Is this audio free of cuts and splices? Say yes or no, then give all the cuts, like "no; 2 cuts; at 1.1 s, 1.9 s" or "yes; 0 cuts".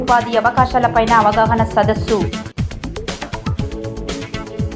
yes; 0 cuts